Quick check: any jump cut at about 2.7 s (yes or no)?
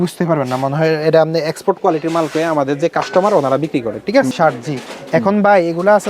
no